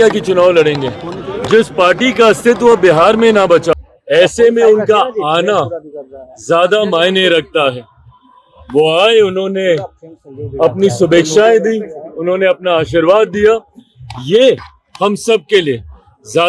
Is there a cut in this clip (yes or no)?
yes